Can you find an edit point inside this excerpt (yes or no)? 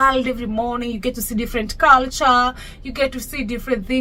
no